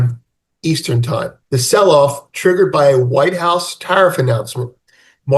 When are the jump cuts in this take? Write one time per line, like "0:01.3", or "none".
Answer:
0:01.4